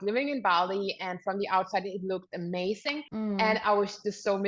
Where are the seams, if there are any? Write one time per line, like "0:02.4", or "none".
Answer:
0:03.0